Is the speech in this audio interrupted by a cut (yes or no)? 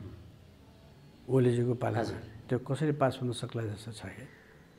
yes